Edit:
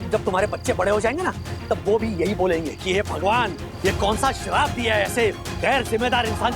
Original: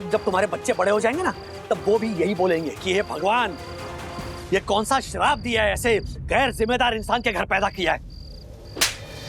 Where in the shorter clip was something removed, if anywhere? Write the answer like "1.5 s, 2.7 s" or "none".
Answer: 3.6 s